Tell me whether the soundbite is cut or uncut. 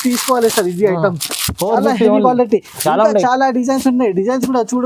uncut